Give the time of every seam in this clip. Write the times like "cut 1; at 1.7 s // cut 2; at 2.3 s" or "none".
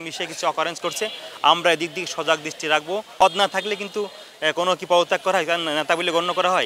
cut 1; at 3.2 s